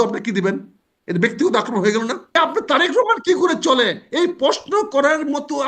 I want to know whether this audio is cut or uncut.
cut